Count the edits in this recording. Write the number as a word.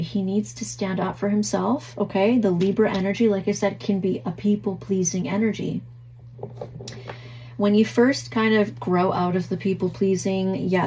zero